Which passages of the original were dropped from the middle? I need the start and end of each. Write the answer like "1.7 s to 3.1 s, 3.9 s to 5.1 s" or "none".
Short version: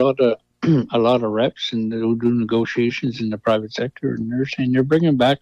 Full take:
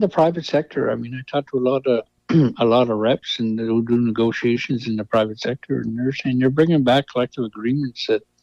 none